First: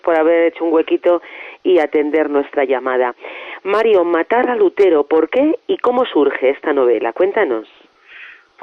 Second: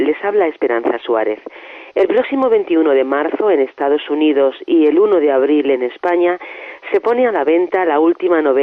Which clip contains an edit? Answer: first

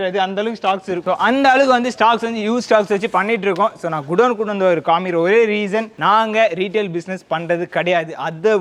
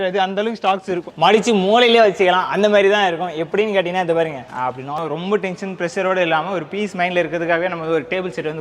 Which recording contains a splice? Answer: second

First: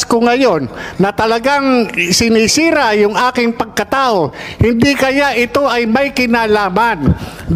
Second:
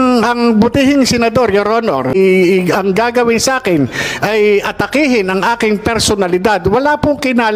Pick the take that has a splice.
second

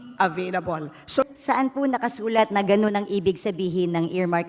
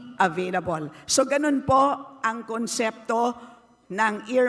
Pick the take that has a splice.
first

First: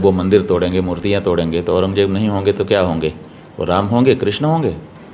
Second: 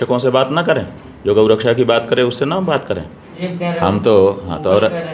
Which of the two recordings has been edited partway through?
second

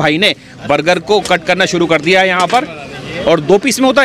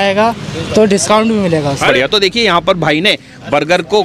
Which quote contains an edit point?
second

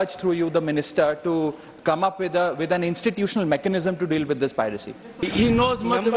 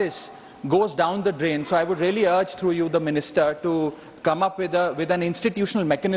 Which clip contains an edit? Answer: first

